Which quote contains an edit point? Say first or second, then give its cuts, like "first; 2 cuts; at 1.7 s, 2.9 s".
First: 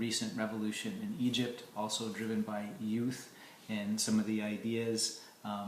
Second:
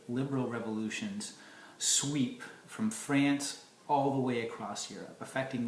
first; 1 cut; at 4.4 s